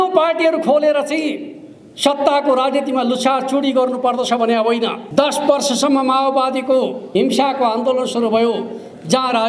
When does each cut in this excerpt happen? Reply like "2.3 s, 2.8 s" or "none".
5.0 s, 7.0 s